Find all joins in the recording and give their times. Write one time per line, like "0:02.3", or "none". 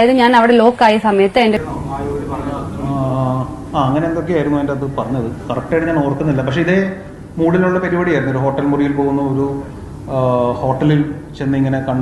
0:01.6